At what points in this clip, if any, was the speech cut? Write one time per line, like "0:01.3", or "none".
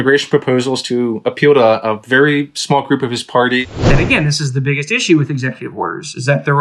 0:03.6